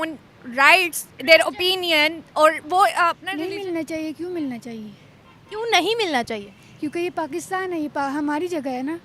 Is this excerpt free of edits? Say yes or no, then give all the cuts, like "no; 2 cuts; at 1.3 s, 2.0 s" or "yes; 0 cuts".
no; 1 cut; at 3.3 s